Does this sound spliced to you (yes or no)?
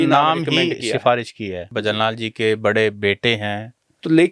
yes